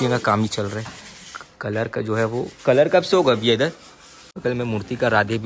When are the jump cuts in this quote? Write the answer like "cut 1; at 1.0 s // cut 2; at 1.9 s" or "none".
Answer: cut 1; at 4.3 s